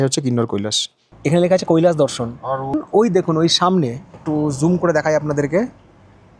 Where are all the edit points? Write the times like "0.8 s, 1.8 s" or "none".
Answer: 1.1 s, 2.8 s